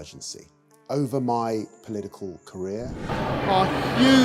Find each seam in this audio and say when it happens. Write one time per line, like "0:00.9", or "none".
0:02.9